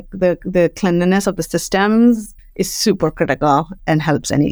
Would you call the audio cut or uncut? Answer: cut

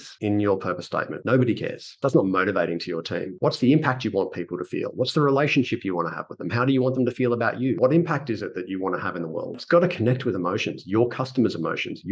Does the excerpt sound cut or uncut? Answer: cut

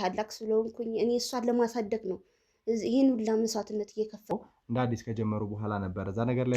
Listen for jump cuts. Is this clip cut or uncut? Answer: cut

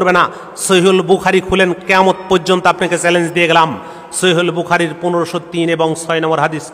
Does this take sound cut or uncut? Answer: uncut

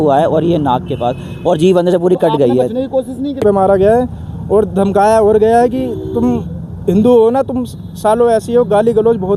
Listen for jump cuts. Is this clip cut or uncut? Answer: cut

